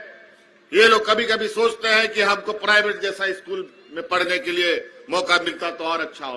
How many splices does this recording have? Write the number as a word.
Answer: zero